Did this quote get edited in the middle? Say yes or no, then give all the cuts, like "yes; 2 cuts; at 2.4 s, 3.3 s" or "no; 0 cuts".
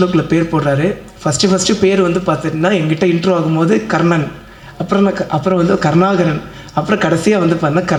no; 0 cuts